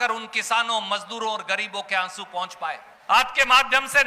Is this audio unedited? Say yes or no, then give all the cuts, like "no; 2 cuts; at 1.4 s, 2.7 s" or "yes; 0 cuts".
no; 1 cut; at 2.9 s